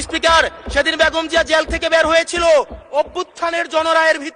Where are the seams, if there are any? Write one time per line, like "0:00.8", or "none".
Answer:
none